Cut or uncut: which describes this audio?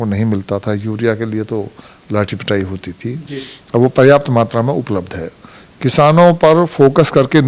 uncut